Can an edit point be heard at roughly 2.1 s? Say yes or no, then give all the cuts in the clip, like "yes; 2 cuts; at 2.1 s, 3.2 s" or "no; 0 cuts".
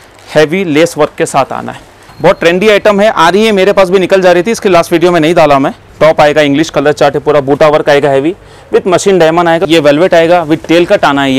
yes; 3 cuts; at 2.1 s, 5.8 s, 9.7 s